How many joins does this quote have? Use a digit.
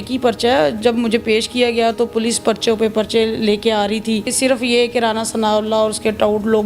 1